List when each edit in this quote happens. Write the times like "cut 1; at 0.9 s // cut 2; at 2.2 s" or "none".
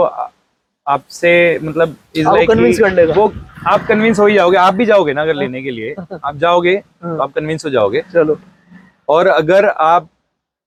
none